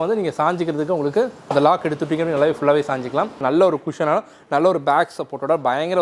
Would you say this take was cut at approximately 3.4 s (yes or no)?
yes